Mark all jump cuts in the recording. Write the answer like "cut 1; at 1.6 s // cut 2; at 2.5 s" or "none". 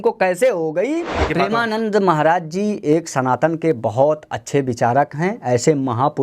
cut 1; at 1.2 s